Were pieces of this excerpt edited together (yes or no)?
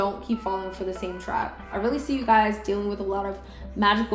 yes